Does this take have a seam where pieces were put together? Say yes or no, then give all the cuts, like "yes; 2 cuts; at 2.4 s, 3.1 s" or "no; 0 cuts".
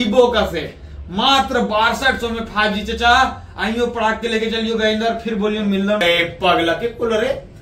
yes; 1 cut; at 6.0 s